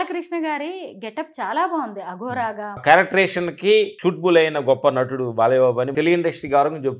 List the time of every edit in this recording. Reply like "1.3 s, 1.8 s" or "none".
2.8 s, 5.9 s